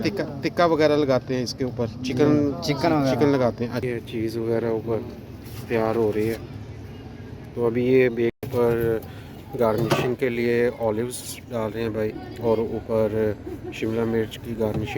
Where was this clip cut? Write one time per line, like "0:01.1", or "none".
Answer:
0:03.9
0:08.4

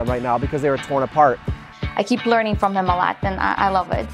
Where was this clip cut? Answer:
0:01.6

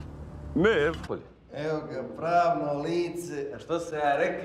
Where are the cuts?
none

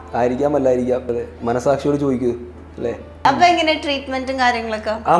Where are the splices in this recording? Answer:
0:01.1
0:03.2

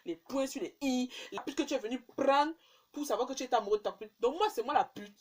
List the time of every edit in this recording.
0:01.4

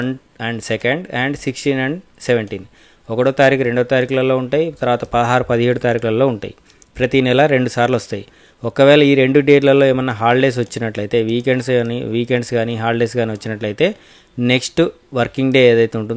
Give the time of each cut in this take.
none

